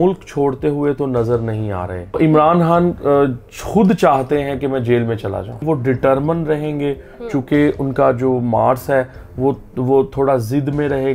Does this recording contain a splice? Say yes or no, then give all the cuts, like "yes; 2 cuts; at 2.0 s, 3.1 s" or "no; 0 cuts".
yes; 2 cuts; at 2.2 s, 5.6 s